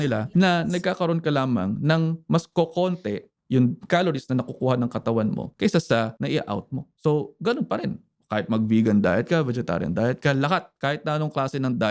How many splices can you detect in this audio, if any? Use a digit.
0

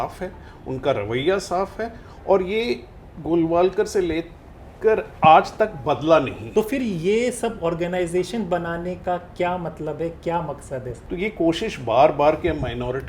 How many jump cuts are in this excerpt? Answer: 2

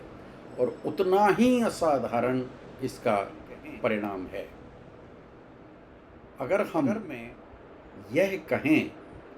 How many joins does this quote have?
1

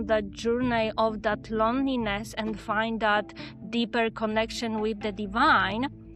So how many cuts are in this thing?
0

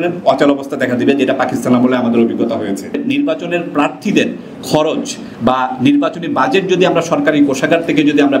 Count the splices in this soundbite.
1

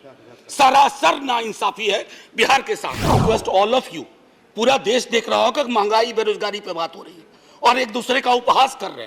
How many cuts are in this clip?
1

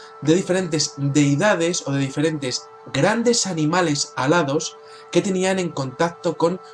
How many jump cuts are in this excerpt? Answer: 1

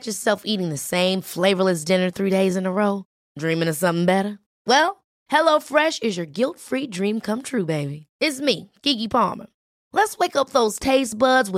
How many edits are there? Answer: 0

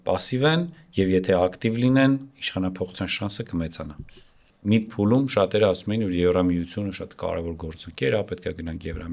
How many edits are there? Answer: 1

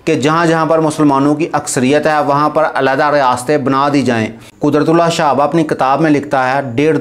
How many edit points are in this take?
1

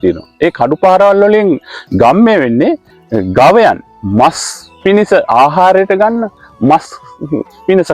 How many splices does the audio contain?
1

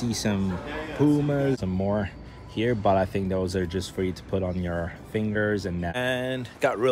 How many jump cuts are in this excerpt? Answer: 2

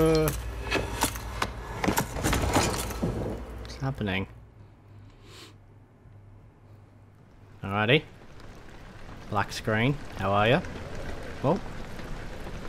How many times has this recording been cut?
1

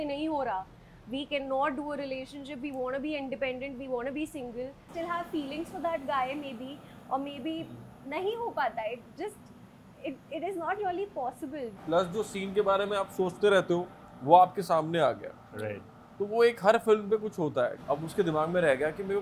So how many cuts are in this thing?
3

